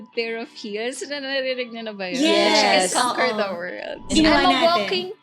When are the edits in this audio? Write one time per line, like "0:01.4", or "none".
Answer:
0:04.1